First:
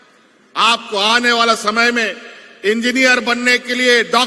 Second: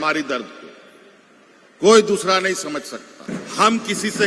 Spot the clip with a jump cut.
second; 1 cut; at 3.1 s

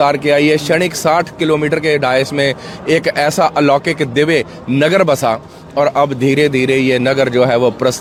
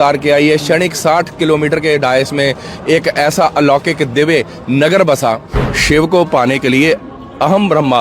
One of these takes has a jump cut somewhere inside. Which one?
second; 1 cut; at 5.6 s

